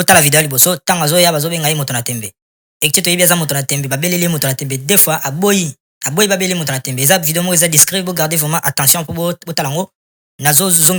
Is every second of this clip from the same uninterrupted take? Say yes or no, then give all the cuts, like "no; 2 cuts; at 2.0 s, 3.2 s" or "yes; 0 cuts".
yes; 0 cuts